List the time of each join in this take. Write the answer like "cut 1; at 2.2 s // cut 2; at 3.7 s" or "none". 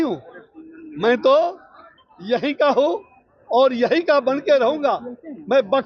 none